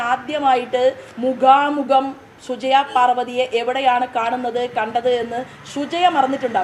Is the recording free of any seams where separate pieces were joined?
yes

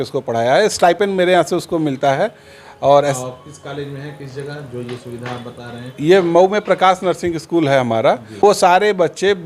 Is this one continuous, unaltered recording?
no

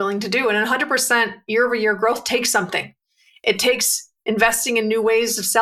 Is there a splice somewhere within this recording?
no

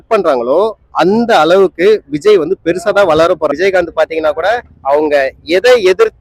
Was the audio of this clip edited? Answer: yes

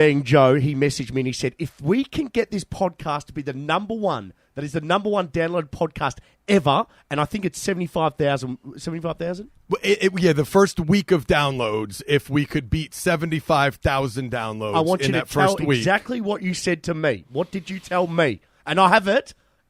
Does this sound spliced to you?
no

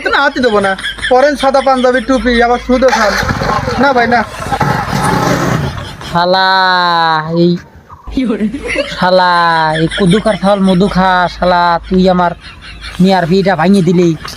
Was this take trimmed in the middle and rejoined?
no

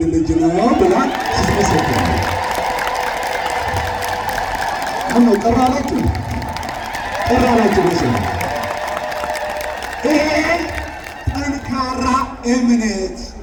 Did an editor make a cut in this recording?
no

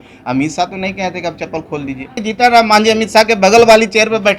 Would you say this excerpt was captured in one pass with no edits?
no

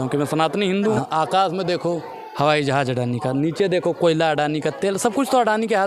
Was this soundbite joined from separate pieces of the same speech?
yes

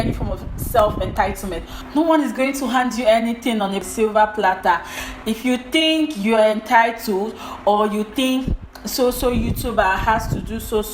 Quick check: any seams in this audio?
no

